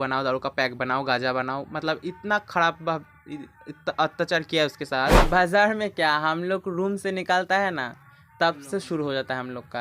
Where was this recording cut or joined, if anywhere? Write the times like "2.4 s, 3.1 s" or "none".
5.2 s